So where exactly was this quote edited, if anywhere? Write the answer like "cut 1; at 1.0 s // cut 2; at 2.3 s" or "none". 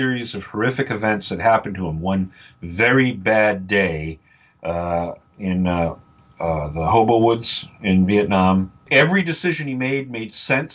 cut 1; at 8.9 s